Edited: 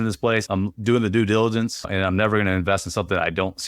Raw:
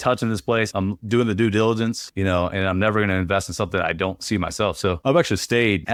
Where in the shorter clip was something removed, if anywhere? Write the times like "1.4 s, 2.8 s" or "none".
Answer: 1.9 s